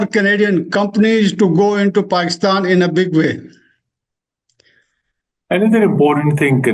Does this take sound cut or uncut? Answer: uncut